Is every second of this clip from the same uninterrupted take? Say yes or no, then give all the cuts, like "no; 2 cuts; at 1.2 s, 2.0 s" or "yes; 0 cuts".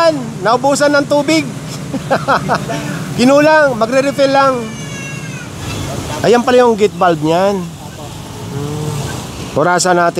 no; 2 cuts; at 5.5 s, 9.3 s